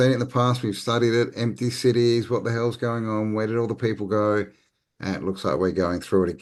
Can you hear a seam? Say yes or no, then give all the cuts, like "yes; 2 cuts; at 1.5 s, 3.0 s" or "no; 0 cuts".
no; 0 cuts